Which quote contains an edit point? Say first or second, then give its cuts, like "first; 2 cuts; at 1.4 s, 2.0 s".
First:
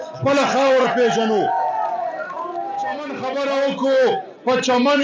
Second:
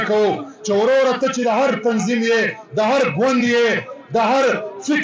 first; 1 cut; at 3.2 s